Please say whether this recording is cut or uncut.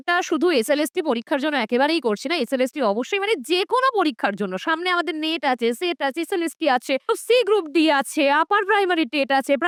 uncut